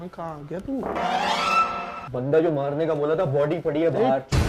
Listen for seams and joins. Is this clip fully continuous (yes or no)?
yes